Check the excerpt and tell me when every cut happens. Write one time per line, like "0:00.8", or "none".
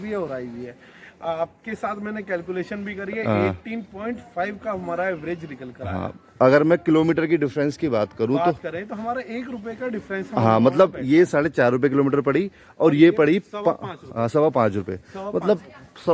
none